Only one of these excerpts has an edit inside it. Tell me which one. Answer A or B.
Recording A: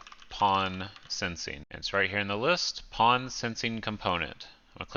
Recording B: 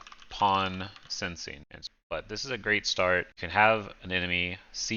B